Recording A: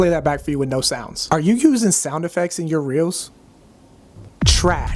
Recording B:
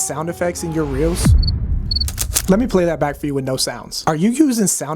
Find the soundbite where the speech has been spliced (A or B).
B